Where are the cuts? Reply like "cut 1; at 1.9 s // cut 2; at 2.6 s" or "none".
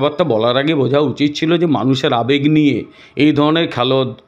none